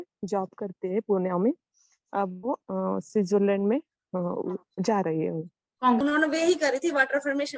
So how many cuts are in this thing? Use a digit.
1